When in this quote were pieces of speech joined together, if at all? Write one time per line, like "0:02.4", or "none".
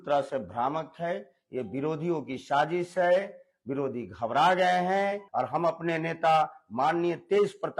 0:05.2